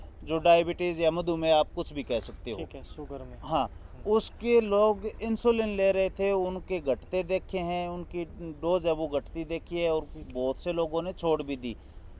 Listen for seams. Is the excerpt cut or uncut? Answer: uncut